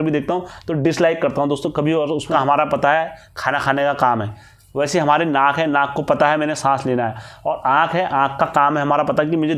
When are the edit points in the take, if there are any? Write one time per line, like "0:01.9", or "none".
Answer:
0:02.3